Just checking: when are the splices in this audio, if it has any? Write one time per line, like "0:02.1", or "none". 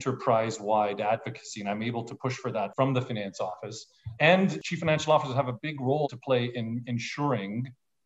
0:02.7
0:04.6
0:06.1